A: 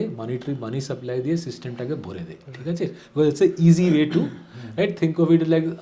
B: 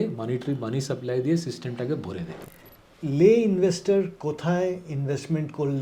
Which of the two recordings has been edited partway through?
B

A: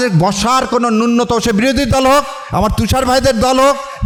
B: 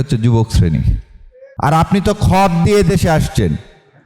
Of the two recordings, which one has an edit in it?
B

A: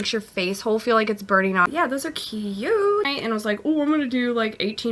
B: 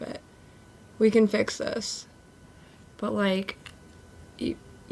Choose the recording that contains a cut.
A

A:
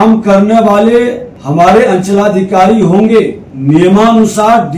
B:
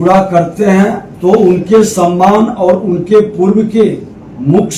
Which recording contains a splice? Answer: A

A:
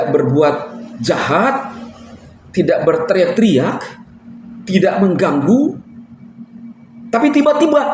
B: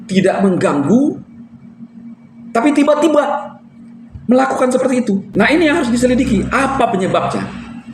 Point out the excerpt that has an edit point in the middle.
B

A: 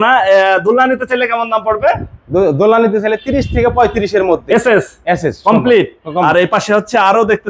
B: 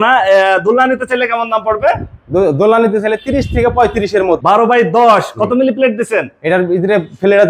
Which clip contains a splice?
B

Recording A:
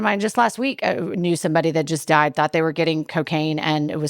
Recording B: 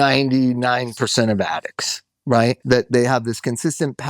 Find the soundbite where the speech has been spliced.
B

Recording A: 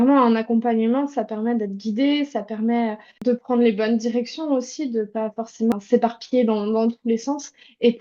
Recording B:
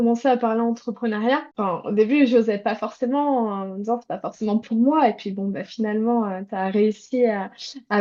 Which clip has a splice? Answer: A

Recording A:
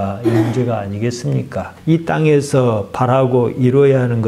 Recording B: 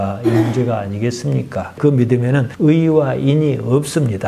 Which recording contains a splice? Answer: B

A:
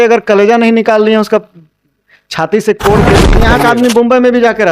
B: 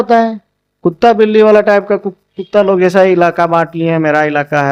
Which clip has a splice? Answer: A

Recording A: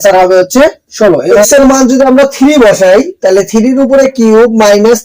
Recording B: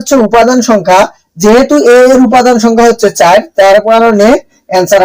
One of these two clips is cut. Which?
A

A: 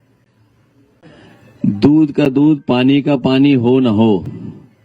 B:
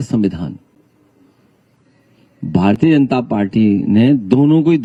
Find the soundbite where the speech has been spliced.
A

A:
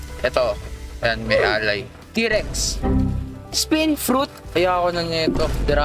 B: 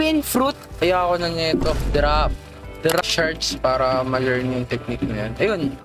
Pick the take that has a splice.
B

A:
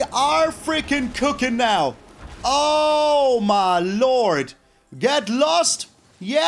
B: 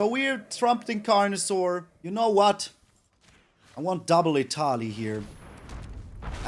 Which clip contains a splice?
B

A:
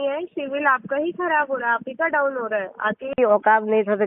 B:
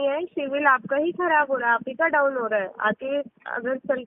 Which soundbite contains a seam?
A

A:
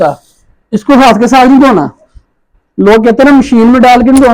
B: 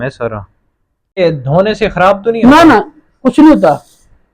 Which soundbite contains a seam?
B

